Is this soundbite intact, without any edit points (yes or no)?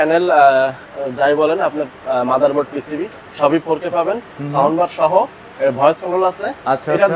yes